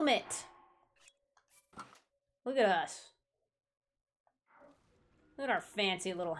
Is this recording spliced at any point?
no; 0 cuts

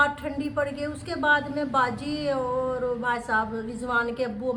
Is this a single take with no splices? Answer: yes; 0 cuts

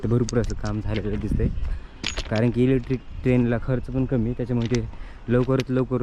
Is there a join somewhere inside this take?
no; 0 cuts

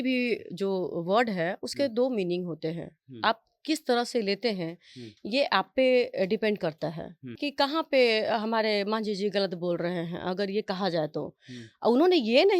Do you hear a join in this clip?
yes; 1 cut; at 7.4 s

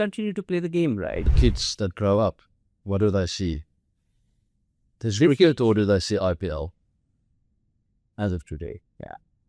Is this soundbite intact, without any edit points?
no; 1 cut; at 1.3 s

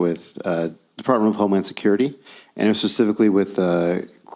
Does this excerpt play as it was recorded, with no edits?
yes; 0 cuts

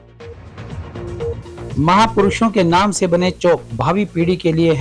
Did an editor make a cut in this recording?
yes; 1 cut; at 1.7 s

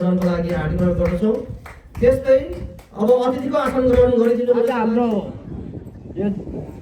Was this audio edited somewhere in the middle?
yes; 1 cut; at 4.8 s

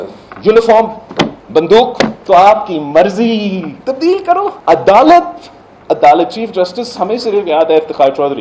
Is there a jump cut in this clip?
yes; 4 cuts; at 1.4 s, 2.2 s, 3.7 s, 4.6 s

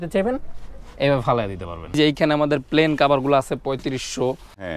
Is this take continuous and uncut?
no; 1 cut; at 2.0 s

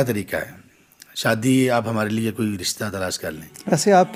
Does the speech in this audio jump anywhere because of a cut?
no; 0 cuts

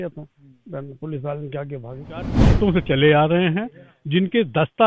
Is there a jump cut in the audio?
yes; 1 cut; at 2.4 s

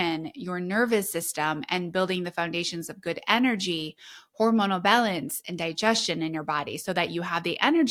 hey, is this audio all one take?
yes; 0 cuts

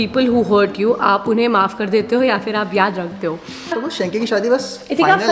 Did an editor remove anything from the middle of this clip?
yes; 1 cut; at 3.8 s

